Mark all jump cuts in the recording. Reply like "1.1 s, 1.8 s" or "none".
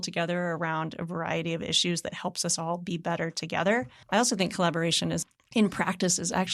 4.0 s, 5.2 s